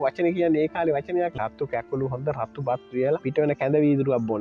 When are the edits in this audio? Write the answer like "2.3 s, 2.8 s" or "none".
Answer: 1.4 s, 3.2 s